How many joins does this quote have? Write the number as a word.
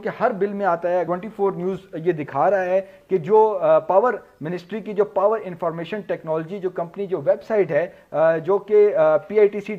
one